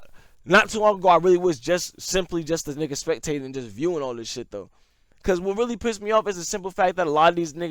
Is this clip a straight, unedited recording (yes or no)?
yes